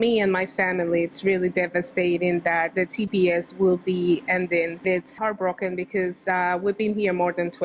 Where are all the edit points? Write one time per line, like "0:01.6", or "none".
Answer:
0:05.1